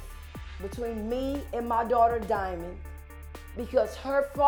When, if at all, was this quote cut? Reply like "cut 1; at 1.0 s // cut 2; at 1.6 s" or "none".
none